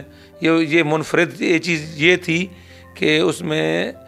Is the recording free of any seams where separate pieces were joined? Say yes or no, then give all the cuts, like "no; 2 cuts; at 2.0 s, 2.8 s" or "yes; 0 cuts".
yes; 0 cuts